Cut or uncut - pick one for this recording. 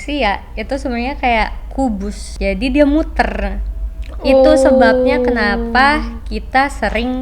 cut